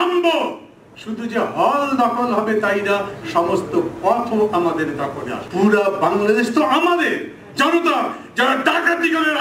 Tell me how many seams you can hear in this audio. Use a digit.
1